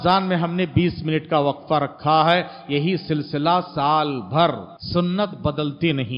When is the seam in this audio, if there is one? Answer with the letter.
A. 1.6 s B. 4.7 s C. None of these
B